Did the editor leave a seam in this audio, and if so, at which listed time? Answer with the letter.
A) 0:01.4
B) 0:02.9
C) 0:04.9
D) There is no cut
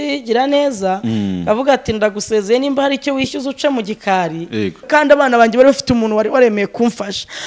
C